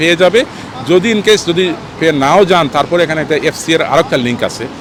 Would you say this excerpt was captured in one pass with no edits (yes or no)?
yes